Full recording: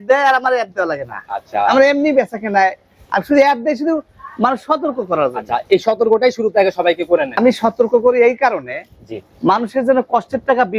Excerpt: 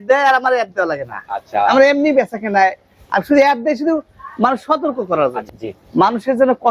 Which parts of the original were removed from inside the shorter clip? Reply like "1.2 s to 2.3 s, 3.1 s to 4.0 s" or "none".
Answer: 5.5 s to 8.9 s